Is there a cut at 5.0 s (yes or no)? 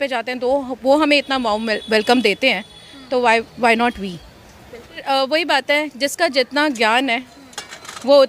yes